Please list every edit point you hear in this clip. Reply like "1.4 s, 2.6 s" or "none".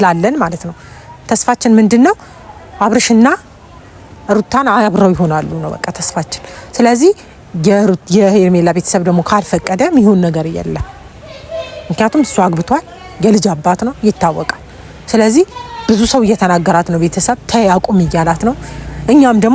none